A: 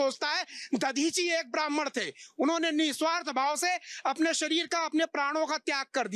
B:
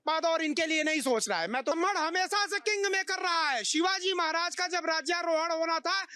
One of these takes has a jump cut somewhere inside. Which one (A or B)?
B